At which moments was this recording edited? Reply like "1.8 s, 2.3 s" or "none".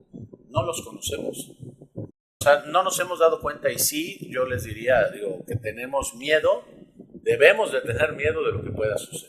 2.3 s